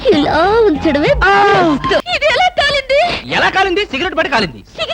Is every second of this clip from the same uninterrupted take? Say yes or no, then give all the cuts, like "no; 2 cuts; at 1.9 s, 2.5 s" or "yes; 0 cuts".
no; 1 cut; at 2.0 s